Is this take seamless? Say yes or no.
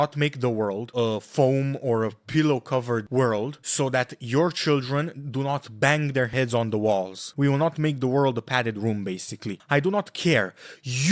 yes